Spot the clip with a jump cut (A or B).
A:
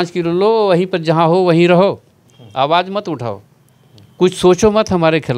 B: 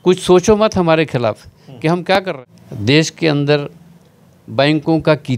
B